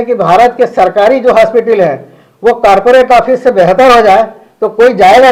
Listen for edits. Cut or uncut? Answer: uncut